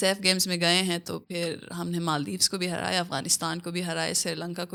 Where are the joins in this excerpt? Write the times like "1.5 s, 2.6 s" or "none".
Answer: none